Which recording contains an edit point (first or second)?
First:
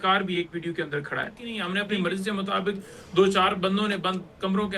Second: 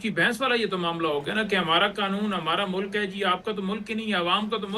first